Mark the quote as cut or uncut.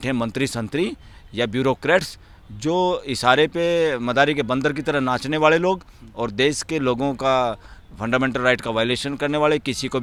uncut